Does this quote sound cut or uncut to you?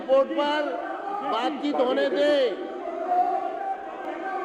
uncut